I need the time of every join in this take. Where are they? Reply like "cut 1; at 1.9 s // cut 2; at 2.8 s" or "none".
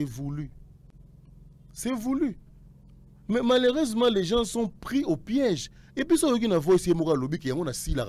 none

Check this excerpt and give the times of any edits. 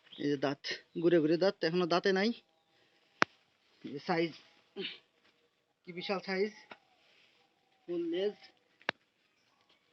none

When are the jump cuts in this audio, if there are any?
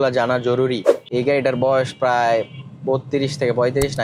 cut 1; at 1.1 s

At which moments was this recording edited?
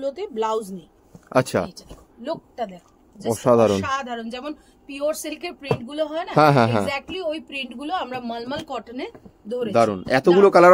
none

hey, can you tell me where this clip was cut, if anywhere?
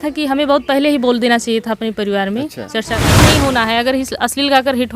cut 1; at 3.1 s

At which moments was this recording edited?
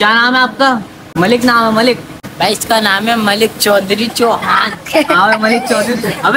cut 1; at 1.0 s // cut 2; at 2.2 s

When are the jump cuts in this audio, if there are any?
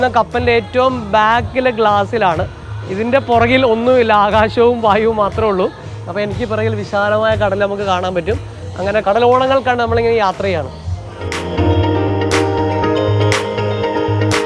none

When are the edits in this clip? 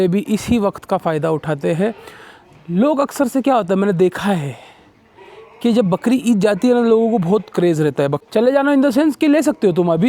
cut 1; at 8.2 s

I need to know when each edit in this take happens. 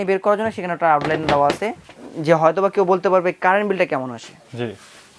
cut 1; at 2.1 s

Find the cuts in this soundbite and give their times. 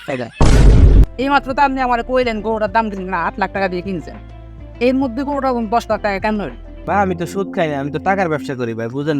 cut 1; at 1.1 s // cut 2; at 6.7 s

